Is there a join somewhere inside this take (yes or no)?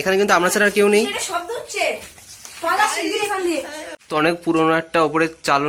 no